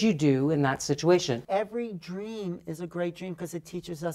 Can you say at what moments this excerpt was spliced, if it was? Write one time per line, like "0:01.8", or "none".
0:01.4